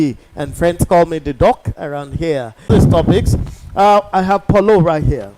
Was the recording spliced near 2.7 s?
yes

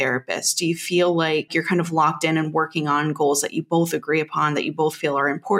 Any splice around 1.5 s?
yes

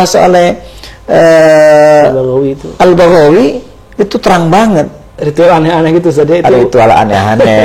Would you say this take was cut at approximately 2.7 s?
no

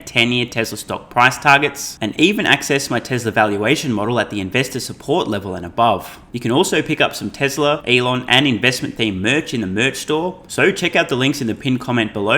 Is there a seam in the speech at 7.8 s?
yes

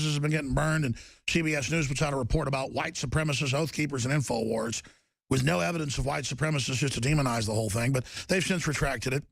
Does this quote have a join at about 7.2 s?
no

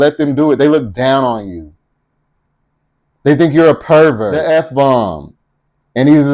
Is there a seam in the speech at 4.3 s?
yes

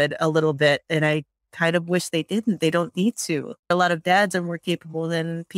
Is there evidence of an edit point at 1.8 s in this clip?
no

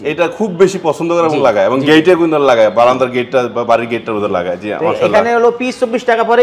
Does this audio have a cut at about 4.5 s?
no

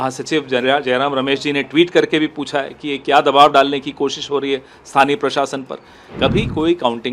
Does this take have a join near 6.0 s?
yes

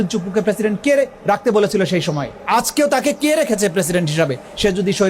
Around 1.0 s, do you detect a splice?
no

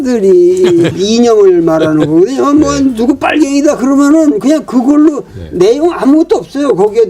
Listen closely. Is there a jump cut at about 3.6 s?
no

